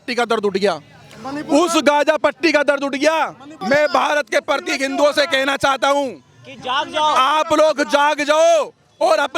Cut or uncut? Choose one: uncut